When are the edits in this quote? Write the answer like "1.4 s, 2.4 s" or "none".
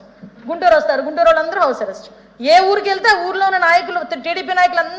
1.5 s